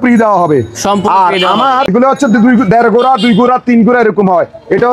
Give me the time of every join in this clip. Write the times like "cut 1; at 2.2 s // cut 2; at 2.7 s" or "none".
cut 1; at 1.9 s